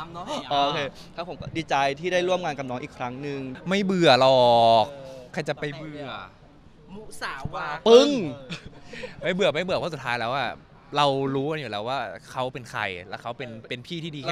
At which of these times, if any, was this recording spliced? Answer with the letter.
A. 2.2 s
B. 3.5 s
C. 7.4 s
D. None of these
B